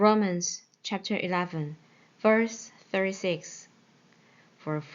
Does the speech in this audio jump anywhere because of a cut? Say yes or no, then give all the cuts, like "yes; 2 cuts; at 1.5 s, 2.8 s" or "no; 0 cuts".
yes; 1 cut; at 1.0 s